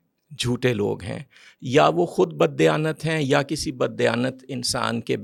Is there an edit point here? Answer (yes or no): no